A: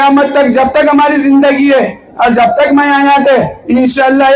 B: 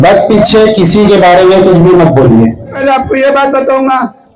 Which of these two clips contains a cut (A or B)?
B